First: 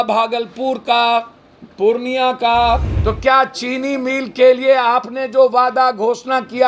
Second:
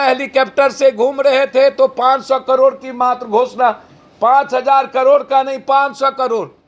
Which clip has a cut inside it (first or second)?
first